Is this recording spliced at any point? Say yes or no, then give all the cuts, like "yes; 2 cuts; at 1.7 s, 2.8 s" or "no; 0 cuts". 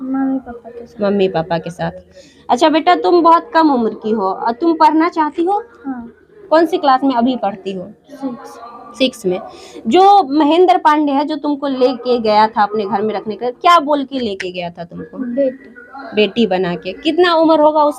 no; 0 cuts